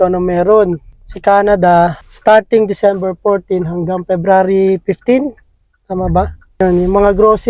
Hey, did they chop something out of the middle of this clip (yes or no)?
no